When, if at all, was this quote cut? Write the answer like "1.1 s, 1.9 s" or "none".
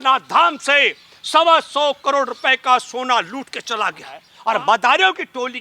4.3 s